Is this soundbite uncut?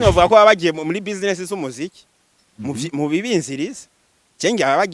yes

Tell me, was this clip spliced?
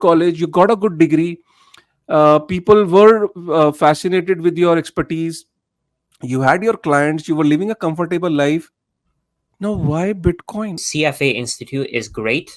yes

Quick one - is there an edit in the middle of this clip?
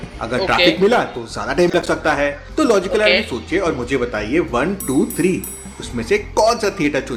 no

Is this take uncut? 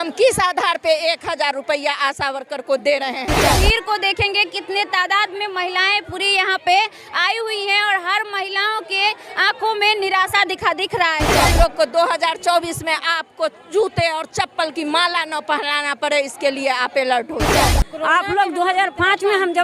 no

